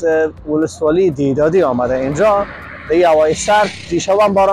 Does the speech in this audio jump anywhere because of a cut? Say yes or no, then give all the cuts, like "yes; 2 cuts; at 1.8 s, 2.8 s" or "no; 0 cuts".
no; 0 cuts